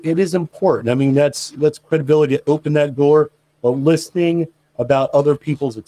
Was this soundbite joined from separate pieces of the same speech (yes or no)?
no